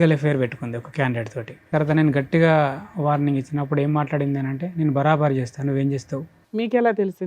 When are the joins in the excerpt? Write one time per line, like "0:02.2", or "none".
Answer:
0:01.7
0:06.4